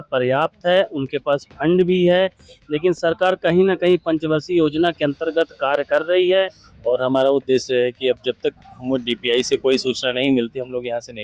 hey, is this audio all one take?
no; 1 cut; at 6.6 s

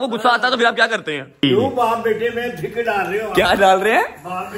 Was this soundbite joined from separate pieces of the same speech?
yes; 1 cut; at 1.4 s

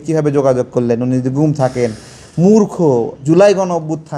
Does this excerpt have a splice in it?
yes; 1 cut; at 3.2 s

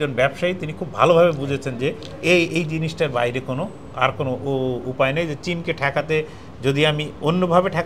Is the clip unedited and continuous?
yes; 0 cuts

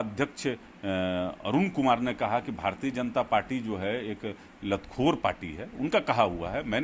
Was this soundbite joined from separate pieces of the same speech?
no; 0 cuts

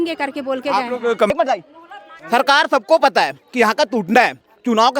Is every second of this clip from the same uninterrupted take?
no; 1 cut; at 1.3 s

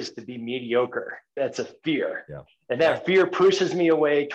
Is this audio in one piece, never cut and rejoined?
no; 1 cut; at 1.3 s

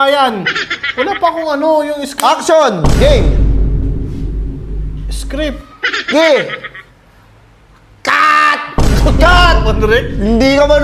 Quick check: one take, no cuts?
yes; 0 cuts

